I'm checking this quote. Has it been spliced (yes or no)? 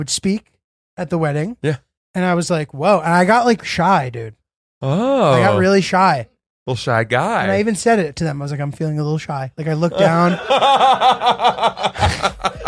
no